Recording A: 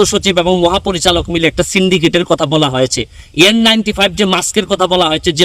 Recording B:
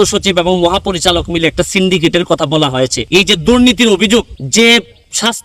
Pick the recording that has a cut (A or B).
B